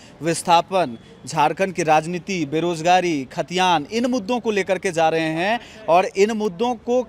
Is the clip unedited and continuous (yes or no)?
yes